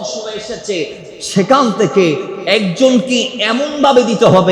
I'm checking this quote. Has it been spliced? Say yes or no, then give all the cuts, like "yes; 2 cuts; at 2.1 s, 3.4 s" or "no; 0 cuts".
no; 0 cuts